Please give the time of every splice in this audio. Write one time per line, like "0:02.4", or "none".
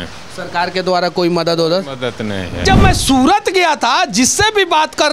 0:02.6